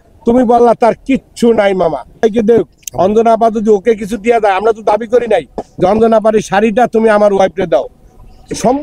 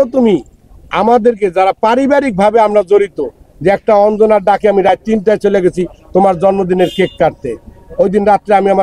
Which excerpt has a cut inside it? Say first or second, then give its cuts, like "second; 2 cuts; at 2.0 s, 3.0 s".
first; 1 cut; at 2.2 s